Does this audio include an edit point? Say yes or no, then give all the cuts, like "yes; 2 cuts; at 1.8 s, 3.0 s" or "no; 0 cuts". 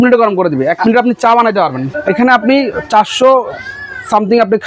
yes; 1 cut; at 1.9 s